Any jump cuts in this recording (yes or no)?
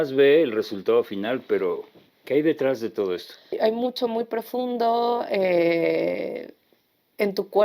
yes